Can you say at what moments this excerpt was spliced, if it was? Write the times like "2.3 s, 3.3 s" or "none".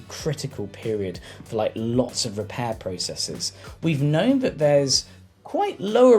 3.6 s